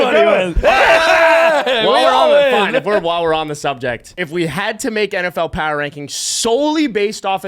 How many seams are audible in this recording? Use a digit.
1